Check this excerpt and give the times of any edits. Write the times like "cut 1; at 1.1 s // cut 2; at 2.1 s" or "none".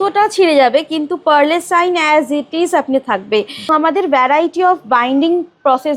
cut 1; at 3.7 s